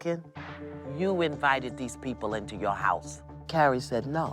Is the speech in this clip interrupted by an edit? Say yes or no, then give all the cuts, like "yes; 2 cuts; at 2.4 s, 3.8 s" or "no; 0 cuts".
yes; 1 cut; at 3.4 s